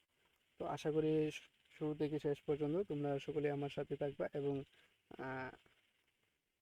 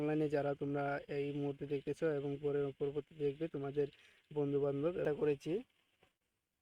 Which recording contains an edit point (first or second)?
second